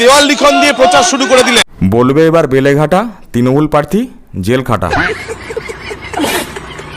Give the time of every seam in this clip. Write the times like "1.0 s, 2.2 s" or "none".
1.7 s, 4.9 s